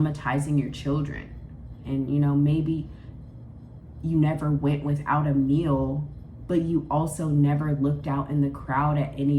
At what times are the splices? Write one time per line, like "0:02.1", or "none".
0:01.7